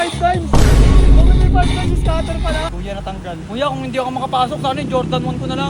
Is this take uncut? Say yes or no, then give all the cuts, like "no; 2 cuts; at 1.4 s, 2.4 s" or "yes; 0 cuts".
no; 1 cut; at 2.7 s